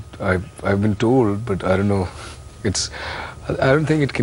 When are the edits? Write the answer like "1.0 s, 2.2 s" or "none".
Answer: 3.1 s